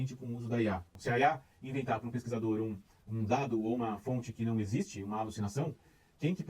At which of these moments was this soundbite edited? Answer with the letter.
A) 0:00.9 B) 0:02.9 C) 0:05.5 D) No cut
A